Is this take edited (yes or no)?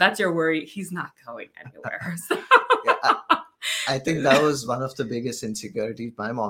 no